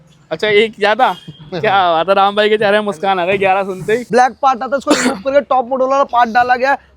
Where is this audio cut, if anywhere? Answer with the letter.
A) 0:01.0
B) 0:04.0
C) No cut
B